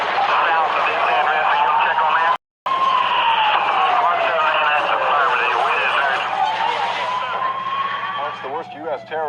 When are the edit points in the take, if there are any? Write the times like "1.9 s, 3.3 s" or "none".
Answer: none